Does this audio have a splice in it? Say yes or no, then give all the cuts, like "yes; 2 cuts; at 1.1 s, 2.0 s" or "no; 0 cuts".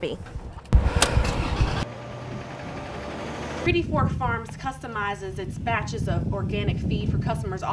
yes; 1 cut; at 3.5 s